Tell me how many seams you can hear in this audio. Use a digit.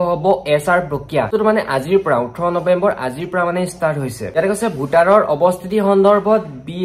0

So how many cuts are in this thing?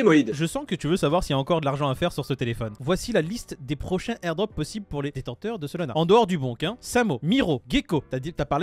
2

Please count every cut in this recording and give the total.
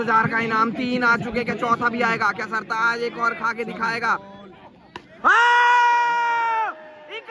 0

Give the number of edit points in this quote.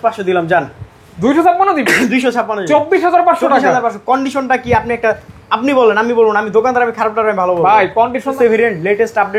1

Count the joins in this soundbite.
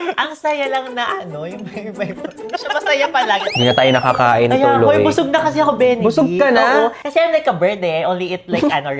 1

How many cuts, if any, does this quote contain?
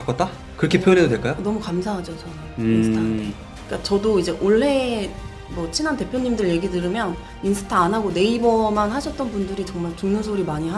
0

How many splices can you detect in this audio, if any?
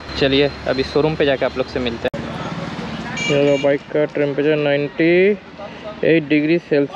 1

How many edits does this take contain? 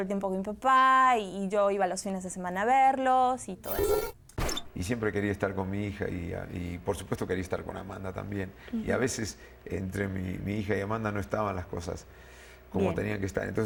0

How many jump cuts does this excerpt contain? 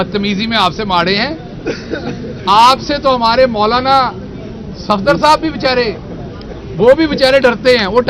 0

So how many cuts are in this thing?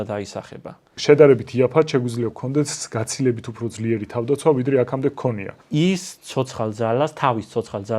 2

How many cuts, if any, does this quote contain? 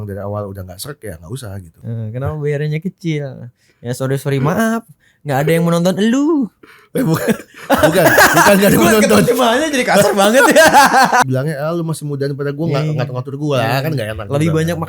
2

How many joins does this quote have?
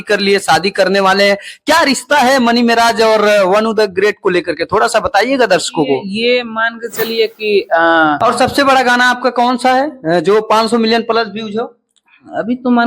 1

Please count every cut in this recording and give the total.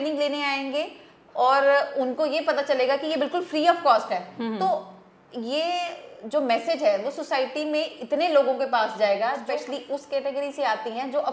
1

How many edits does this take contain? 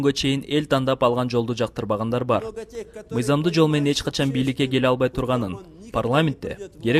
0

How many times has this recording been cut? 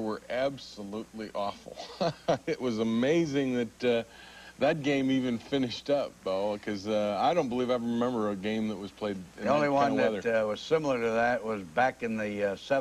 1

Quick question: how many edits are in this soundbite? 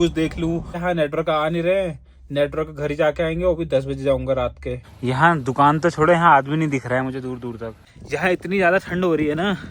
3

